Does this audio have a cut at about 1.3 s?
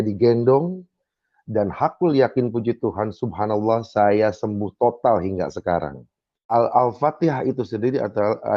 no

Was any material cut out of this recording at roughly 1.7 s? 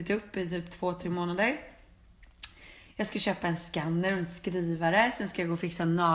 no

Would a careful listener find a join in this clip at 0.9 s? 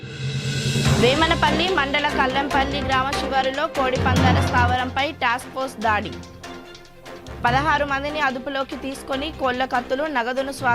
yes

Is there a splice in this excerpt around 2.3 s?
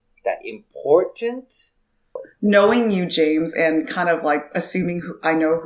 yes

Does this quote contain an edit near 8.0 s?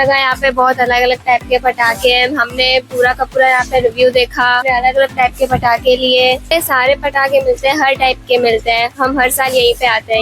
no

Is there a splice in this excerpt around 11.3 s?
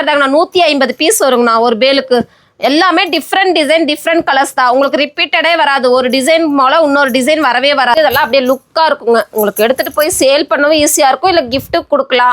no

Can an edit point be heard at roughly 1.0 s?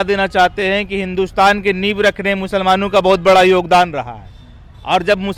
no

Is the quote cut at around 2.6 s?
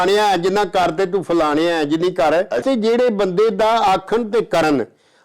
yes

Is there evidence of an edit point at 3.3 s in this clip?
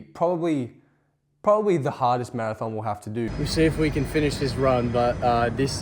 yes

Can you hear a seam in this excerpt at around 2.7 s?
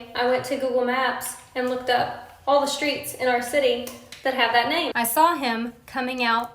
no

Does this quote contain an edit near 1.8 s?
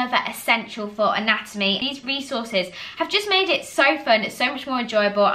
yes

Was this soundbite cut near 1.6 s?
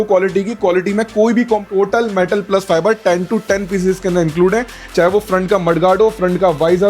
yes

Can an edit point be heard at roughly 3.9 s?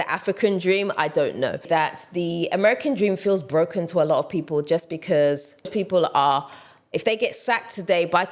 no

